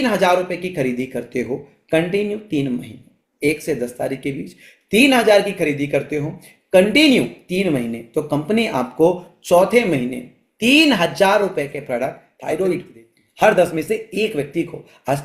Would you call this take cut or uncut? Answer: cut